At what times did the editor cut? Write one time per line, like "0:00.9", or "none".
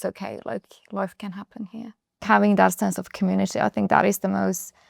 0:02.2

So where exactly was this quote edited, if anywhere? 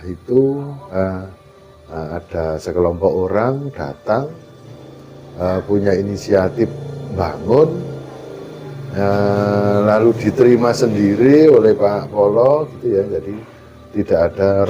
0:01.0

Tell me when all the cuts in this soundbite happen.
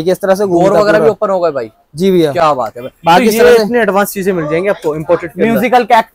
none

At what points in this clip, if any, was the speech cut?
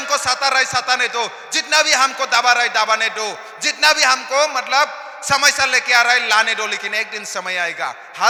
none

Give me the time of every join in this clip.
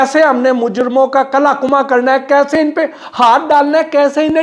none

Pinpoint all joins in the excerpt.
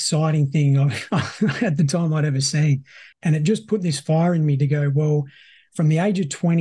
0:03.1

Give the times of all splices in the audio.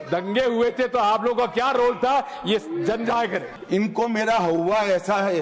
0:03.5

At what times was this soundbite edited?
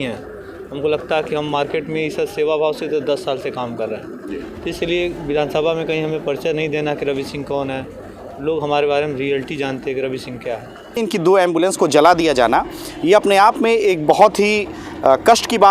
0:11.0

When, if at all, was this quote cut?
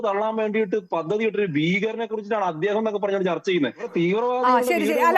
0:03.8

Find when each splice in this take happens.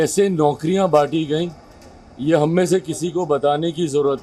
none

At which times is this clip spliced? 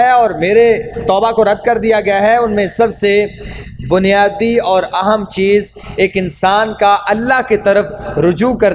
none

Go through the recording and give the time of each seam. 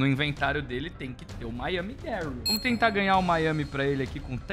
none

